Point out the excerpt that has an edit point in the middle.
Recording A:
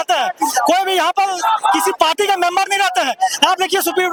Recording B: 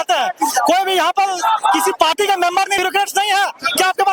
B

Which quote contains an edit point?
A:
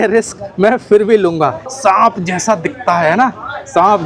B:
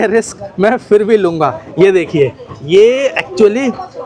A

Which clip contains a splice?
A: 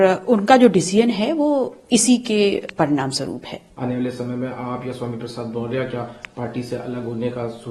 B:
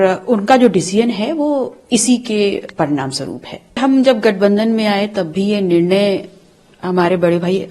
B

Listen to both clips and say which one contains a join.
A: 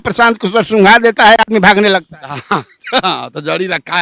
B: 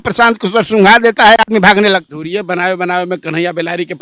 B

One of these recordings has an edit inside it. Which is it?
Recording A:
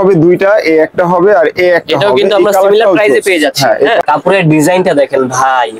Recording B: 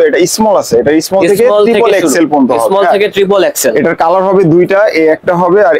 A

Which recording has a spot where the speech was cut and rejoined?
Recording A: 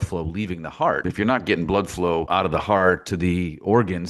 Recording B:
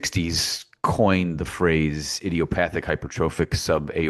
A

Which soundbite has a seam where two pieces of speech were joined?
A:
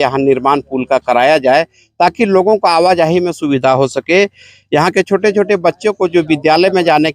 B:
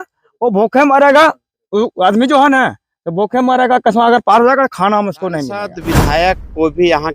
B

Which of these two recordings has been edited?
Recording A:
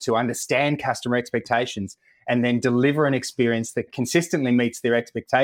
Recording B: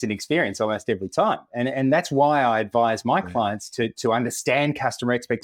A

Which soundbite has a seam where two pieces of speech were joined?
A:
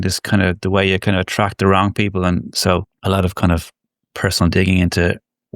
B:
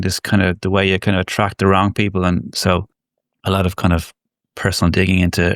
A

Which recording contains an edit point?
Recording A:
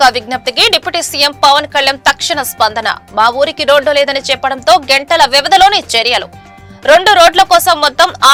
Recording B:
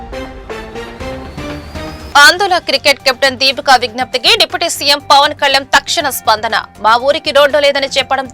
B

